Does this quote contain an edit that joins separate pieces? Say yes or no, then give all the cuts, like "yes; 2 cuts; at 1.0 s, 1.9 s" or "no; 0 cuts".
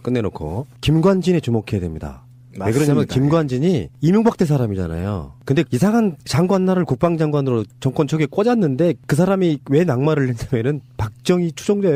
no; 0 cuts